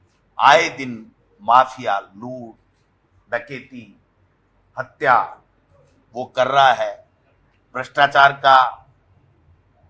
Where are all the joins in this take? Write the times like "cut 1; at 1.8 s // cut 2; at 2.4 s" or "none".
none